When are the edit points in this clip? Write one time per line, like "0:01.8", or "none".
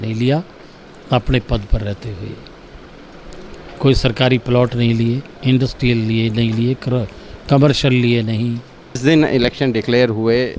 0:09.0